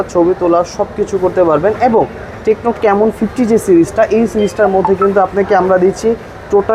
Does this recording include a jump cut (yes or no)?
no